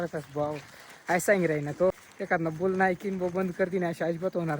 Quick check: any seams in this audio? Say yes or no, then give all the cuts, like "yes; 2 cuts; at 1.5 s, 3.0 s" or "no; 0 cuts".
yes; 1 cut; at 2.1 s